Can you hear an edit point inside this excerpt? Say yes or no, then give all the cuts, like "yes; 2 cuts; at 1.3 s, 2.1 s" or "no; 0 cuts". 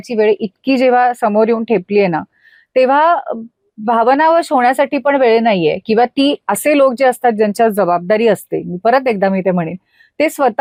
no; 0 cuts